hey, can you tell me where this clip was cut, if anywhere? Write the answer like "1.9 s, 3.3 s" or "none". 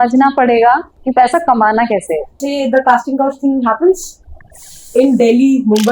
0.9 s, 2.4 s